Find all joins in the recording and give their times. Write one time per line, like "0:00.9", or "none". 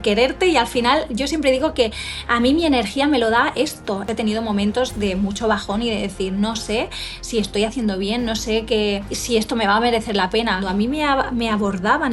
0:04.1
0:09.1
0:10.7